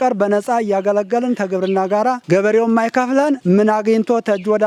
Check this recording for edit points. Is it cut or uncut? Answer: uncut